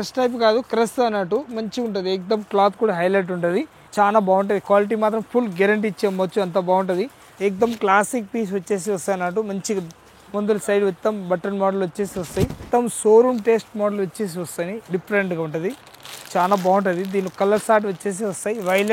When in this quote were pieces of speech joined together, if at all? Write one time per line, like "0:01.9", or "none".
0:03.8
0:07.2
0:12.6